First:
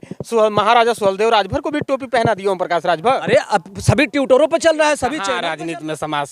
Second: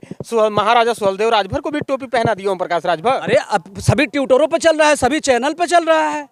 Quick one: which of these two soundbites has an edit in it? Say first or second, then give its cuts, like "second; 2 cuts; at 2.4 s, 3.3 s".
first; 1 cut; at 5.3 s